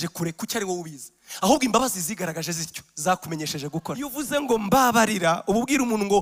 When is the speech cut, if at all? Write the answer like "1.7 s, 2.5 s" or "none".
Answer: 4.2 s

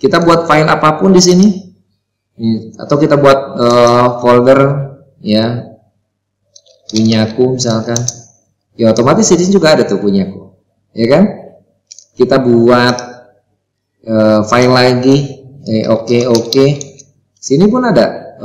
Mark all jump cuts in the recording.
none

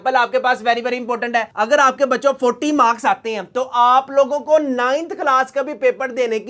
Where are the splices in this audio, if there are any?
1.5 s

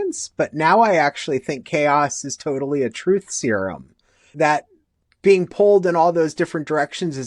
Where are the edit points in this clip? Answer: 4.3 s

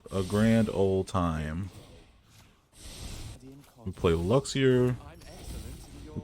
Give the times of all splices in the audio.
3.3 s

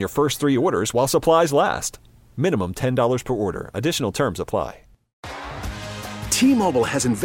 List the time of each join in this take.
5.1 s

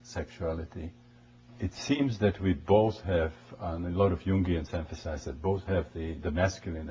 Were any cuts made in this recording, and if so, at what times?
3.0 s

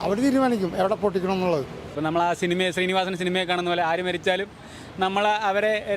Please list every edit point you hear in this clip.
1.8 s

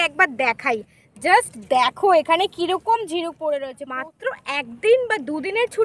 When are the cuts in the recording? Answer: 3.8 s

